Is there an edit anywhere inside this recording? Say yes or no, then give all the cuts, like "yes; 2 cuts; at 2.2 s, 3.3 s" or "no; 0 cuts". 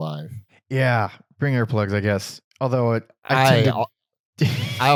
no; 0 cuts